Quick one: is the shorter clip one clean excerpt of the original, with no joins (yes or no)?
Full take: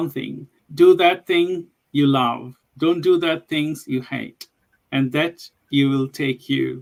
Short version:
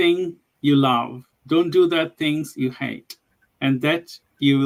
yes